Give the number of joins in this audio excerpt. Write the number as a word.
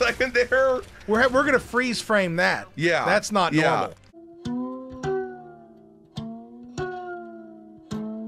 zero